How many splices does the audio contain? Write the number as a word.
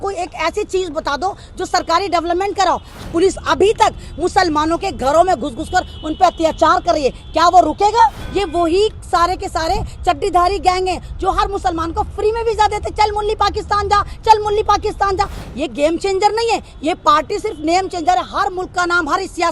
three